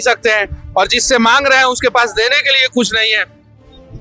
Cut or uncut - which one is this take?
uncut